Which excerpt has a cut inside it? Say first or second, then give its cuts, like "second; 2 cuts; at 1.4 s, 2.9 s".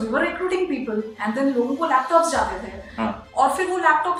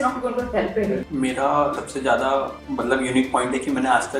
second; 3 cuts; at 1.0 s, 1.8 s, 2.6 s